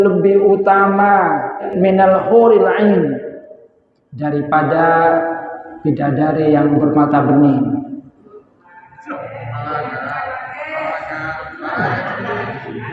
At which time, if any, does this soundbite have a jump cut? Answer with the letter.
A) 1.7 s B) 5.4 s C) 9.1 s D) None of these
A